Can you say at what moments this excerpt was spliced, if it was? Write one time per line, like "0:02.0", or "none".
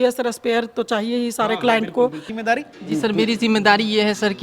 0:02.3